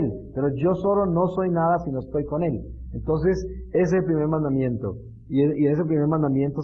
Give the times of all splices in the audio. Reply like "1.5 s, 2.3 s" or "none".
4.7 s